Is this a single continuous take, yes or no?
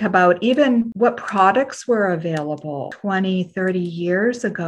no